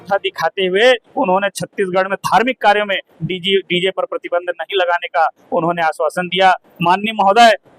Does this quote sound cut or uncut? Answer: uncut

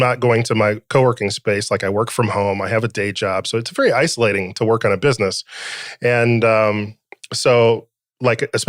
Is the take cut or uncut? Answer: uncut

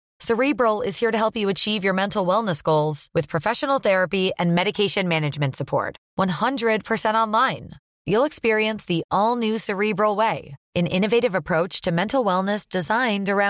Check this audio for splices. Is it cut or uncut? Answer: uncut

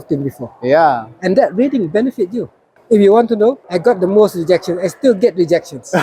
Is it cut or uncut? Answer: cut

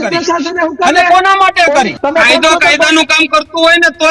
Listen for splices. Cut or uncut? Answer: cut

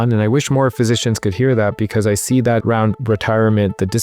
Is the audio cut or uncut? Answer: cut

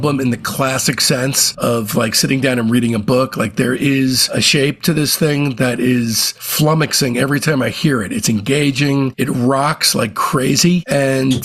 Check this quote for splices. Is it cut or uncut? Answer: uncut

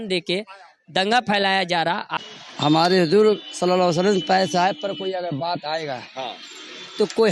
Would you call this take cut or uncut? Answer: cut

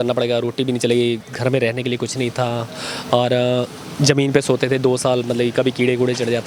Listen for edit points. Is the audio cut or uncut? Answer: uncut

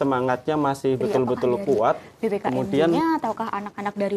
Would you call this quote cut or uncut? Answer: cut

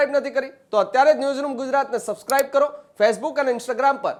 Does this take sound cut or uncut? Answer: uncut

